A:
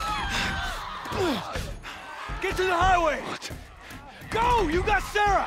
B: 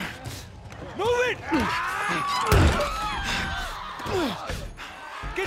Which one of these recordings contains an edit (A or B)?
B